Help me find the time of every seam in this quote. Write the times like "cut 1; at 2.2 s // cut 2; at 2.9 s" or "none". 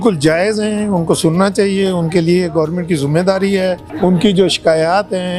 none